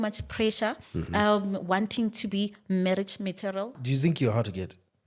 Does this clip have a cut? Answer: yes; 1 cut; at 3.8 s

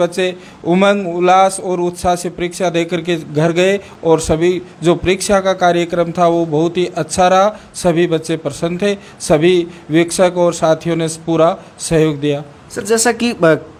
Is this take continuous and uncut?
yes; 0 cuts

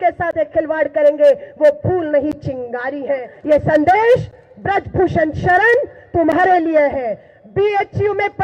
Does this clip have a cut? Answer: yes; 1 cut; at 3.3 s

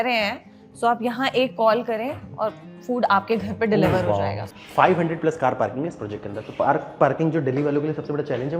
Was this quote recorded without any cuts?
no; 1 cut; at 4.4 s

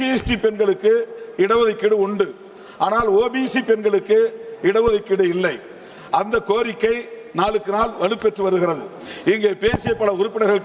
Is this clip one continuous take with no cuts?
yes; 0 cuts

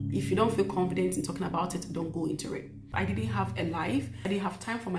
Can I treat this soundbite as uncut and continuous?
no; 2 cuts; at 2.8 s, 4.2 s

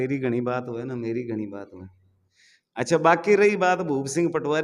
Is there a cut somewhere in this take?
no; 0 cuts

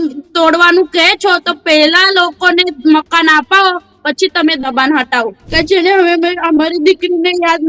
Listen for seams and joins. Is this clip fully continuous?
no; 1 cut; at 5.4 s

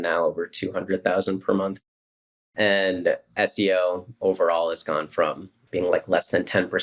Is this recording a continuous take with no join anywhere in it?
no; 2 cuts; at 1.8 s, 5.6 s

